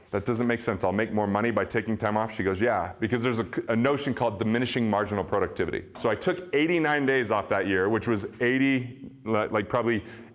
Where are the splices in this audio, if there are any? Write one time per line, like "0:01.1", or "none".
0:06.0